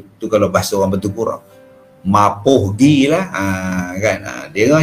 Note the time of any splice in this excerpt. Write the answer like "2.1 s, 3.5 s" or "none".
none